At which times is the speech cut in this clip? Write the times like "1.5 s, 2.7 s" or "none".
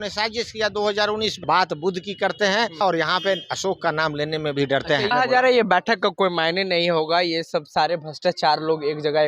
1.4 s, 2.8 s, 5.1 s